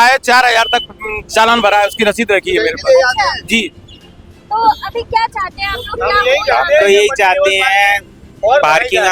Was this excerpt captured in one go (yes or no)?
yes